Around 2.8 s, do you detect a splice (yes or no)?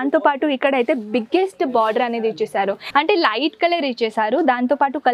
yes